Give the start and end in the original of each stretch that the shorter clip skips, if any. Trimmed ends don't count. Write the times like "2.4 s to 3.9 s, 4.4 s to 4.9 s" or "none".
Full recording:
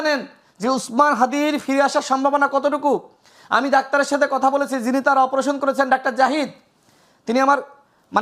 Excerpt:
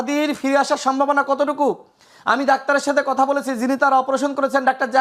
none